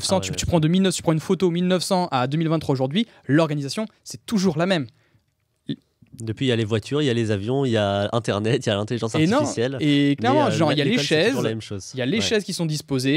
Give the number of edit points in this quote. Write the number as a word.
zero